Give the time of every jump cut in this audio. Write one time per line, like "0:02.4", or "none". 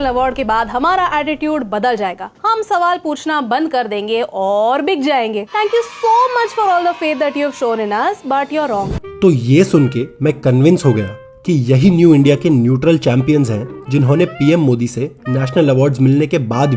none